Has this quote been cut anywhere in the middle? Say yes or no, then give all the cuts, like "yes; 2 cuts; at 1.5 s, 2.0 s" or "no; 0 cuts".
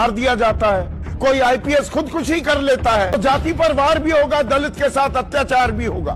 yes; 1 cut; at 3.2 s